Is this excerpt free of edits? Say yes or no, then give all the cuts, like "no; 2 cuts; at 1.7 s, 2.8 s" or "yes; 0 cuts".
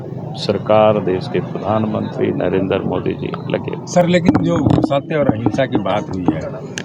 yes; 0 cuts